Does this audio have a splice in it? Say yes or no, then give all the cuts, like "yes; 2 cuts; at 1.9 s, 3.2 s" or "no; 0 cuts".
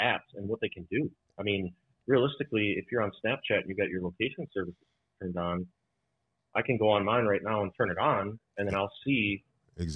no; 0 cuts